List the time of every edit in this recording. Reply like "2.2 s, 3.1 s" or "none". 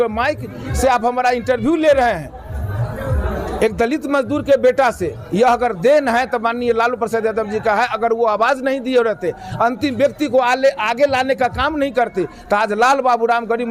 none